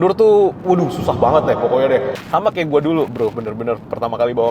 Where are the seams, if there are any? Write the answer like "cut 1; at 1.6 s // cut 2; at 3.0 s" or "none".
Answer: cut 1; at 2.1 s